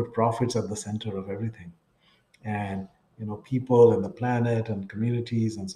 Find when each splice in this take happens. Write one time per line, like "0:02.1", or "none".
none